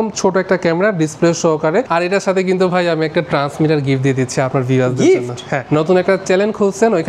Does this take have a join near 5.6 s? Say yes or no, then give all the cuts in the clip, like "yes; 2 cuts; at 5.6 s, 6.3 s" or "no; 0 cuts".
yes; 2 cuts; at 1.9 s, 5.6 s